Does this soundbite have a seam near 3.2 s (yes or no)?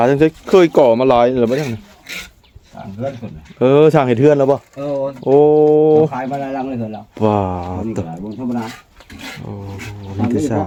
no